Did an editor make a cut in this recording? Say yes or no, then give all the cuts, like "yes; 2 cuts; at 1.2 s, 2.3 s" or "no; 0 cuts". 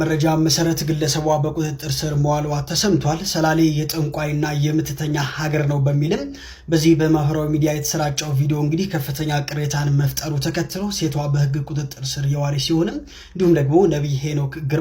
no; 0 cuts